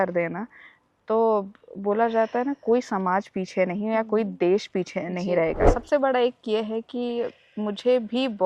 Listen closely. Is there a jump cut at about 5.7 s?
yes; 1 cut; at 5.7 s

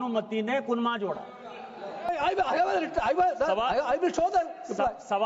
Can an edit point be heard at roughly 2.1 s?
yes; 1 cut; at 2.1 s

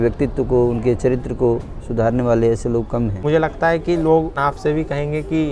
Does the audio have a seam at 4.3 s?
yes; 2 cuts; at 3.2 s, 4.3 s

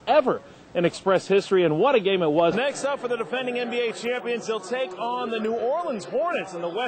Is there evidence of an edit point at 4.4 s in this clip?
no; 1 cut; at 2.6 s

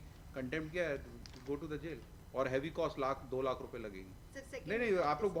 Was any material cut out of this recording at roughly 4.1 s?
no; 0 cuts

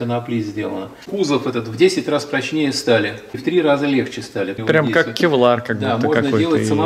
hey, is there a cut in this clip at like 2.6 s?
no; 2 cuts; at 1.0 s, 4.6 s

